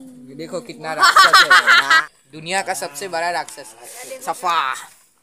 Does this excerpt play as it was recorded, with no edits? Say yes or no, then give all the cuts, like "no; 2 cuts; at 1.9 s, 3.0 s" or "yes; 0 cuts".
no; 1 cut; at 2.1 s